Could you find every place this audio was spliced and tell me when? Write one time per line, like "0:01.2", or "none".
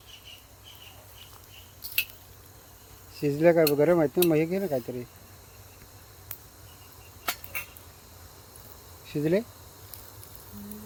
none